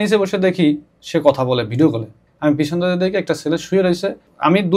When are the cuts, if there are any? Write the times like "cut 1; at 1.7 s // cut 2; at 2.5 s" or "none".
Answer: none